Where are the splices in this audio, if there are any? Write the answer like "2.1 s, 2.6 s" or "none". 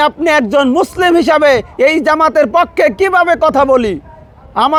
none